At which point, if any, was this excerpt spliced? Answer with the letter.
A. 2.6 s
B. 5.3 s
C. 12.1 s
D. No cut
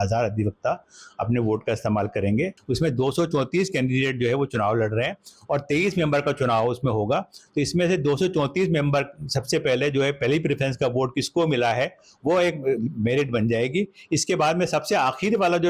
A